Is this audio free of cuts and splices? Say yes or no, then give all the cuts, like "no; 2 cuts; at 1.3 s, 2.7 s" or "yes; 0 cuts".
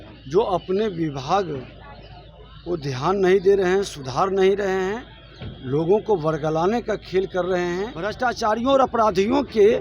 no; 1 cut; at 8.1 s